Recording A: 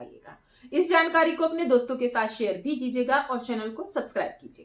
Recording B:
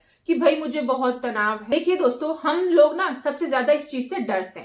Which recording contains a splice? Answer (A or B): B